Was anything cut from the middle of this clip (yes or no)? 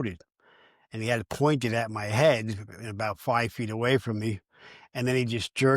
no